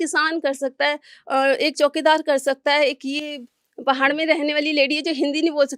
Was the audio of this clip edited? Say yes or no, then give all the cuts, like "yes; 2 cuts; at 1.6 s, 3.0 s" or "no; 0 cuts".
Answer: no; 0 cuts